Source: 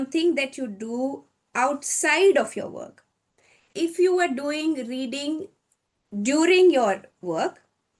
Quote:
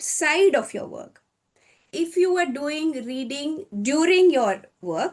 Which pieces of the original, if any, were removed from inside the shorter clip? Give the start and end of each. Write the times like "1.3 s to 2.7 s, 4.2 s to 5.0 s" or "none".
5.5 s to 6.1 s